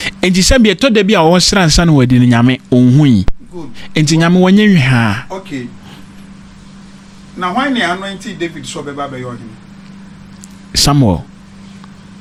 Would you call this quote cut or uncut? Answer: uncut